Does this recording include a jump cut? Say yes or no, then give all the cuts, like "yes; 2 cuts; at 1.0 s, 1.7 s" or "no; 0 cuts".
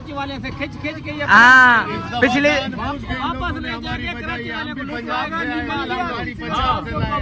no; 0 cuts